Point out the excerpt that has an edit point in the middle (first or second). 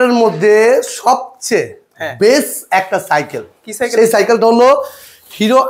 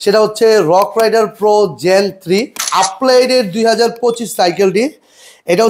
second